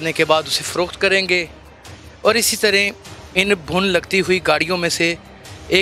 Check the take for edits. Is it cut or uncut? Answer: uncut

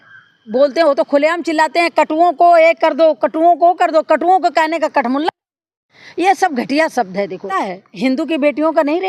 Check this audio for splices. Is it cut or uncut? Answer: cut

